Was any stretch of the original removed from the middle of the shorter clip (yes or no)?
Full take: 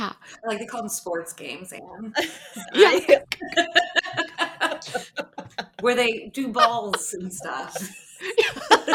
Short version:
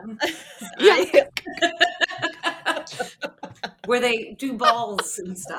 no